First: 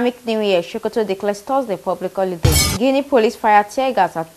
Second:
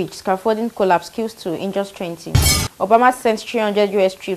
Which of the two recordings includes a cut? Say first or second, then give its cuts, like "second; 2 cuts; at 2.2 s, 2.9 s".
first; 1 cut; at 2.7 s